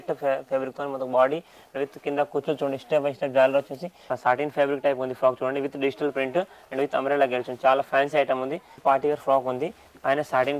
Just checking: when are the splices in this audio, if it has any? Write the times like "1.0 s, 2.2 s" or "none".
4.1 s, 8.7 s